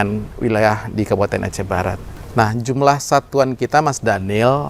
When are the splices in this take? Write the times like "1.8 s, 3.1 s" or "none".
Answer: 2.2 s